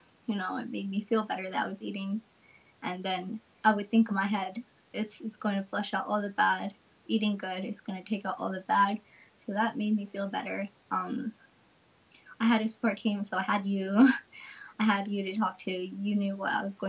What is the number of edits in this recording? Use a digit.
0